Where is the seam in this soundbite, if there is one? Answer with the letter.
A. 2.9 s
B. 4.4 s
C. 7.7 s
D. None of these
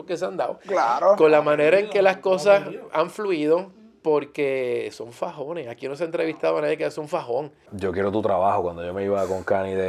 C